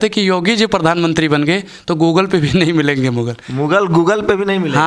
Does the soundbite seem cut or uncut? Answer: uncut